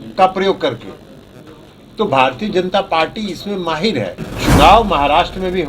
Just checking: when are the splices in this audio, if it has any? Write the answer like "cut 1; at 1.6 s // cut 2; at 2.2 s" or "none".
cut 1; at 4.3 s